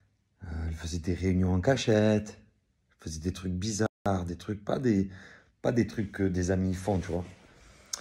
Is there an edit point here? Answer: no; 0 cuts

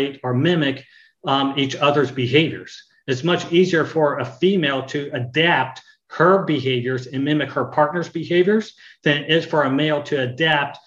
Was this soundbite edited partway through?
no; 0 cuts

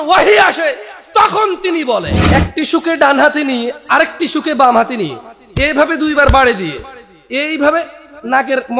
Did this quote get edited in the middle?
yes; 1 cut; at 2.2 s

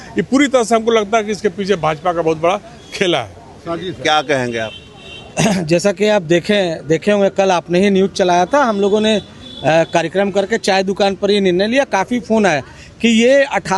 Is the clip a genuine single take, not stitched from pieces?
yes; 0 cuts

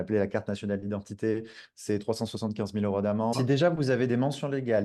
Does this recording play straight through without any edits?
no; 1 cut; at 3.3 s

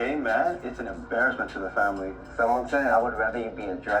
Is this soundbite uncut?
no; 1 cut; at 2.3 s

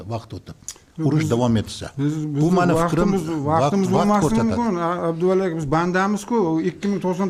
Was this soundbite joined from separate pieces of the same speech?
no; 0 cuts

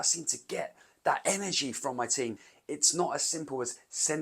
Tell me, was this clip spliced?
yes; 1 cut; at 2.5 s

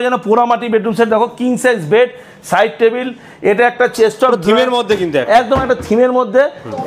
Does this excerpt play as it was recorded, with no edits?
yes; 0 cuts

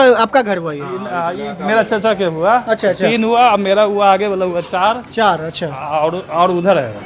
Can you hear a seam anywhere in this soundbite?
no; 0 cuts

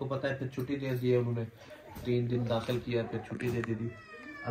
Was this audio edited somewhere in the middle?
no; 0 cuts

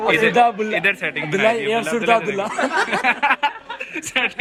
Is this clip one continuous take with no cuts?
yes; 0 cuts

